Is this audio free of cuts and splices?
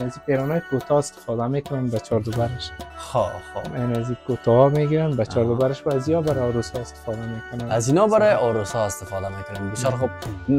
yes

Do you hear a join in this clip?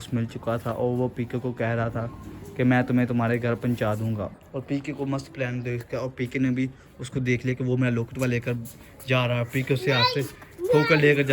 yes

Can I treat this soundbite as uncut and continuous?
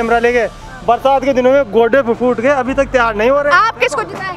yes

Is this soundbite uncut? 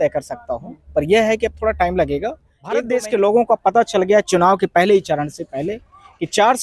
no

